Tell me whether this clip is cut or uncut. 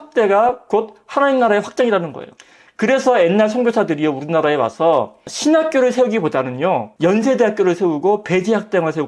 cut